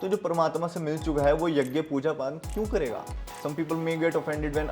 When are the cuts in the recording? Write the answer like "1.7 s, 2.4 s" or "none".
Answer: 3.3 s